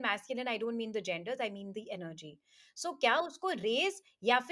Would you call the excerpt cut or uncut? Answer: uncut